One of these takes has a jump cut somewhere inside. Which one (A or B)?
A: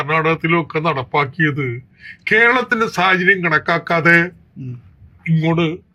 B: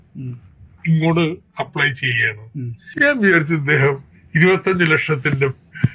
B